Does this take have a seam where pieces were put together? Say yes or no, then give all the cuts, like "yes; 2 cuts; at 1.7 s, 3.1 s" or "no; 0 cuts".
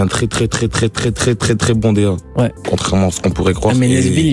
yes; 1 cut; at 2.6 s